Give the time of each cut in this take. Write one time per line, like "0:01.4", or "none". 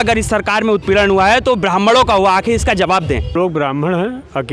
0:03.3